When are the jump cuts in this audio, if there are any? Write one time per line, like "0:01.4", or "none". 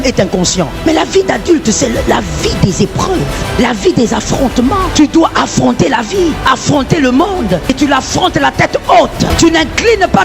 0:00.9
0:03.5
0:04.9
0:06.4
0:07.7
0:09.3